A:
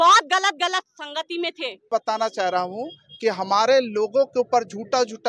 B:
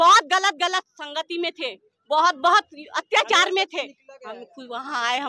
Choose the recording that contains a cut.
A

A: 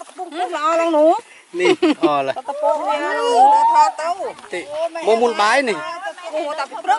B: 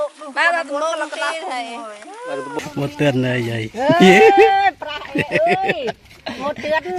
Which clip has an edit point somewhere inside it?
B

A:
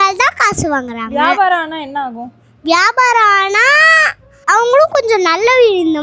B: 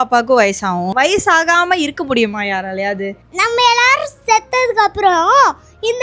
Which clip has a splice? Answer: B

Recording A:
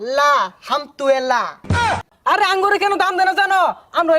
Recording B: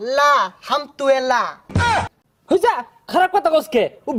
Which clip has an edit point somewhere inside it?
A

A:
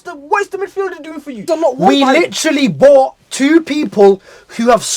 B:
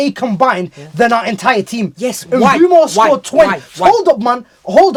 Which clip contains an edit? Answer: A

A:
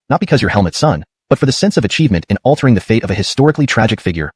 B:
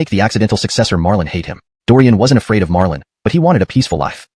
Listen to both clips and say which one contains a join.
B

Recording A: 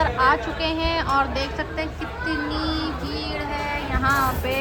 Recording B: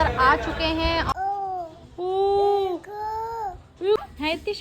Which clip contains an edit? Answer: B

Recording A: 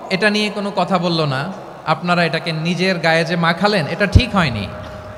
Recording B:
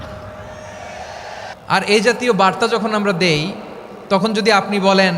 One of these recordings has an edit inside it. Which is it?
B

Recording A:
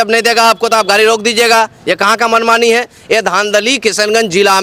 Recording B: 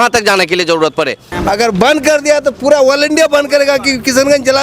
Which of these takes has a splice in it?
B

